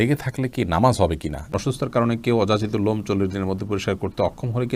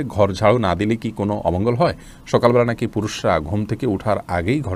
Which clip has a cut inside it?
first; 1 cut; at 1.5 s

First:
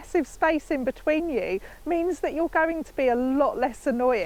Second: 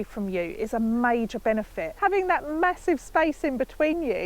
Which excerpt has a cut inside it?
second; 1 cut; at 1.8 s

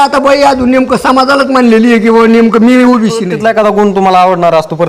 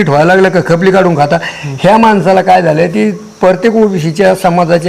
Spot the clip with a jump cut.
first; 1 cut; at 3.3 s

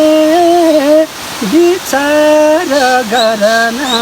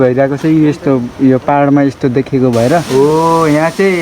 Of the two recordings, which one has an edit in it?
second; 1 cut; at 2.9 s

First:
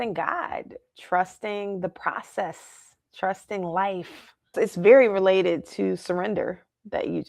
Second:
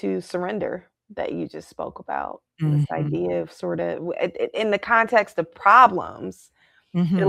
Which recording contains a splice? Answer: first; 1 cut; at 4.5 s

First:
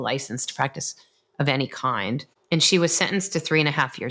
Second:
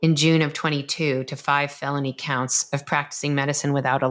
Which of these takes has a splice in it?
first; 1 cut; at 2.3 s

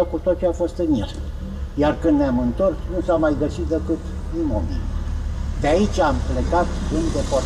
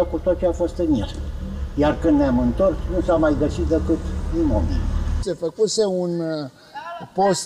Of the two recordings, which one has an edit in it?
second; 1 cut; at 5.2 s

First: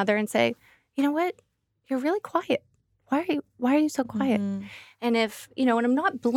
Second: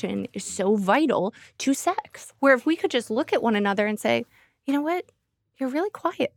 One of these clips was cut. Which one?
second; 1 cut; at 2.2 s

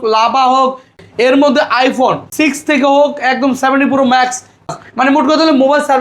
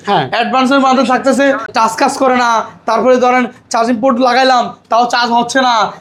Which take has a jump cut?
first; 3 cuts; at 1.0 s, 2.2 s, 4.7 s

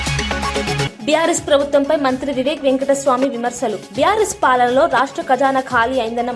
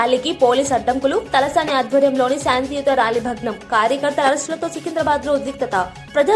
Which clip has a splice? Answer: first; 1 cut; at 0.9 s

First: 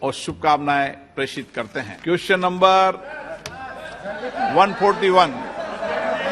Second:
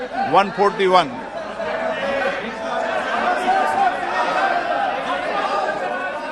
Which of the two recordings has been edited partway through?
first; 1 cut; at 1.8 s

